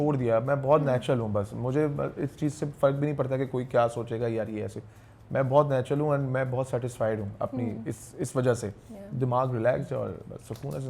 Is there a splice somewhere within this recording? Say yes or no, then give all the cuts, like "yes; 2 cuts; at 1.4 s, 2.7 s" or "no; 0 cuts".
no; 0 cuts